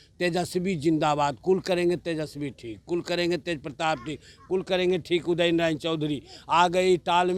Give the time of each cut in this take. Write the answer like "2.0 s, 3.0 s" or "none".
none